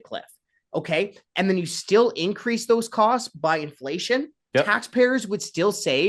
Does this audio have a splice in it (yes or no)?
yes